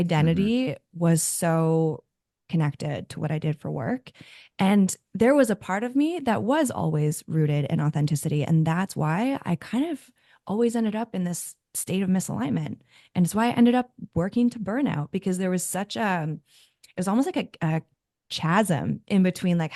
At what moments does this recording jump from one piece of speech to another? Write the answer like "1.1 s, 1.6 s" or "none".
none